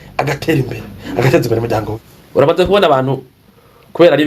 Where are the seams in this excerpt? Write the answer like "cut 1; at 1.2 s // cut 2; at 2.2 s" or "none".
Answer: cut 1; at 1.9 s